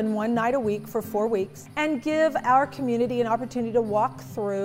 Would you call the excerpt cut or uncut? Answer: cut